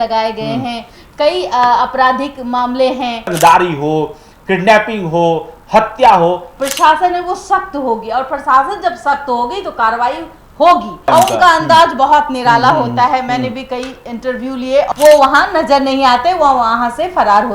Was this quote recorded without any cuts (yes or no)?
no